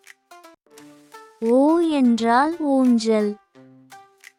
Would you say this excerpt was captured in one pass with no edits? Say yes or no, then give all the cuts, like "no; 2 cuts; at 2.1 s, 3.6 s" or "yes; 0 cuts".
yes; 0 cuts